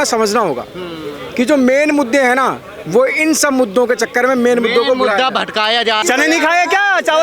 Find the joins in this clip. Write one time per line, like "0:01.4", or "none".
0:06.0